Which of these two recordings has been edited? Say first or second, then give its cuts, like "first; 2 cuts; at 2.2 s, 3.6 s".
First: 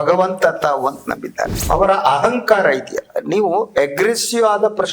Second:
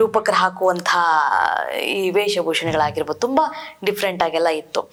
first; 1 cut; at 1.6 s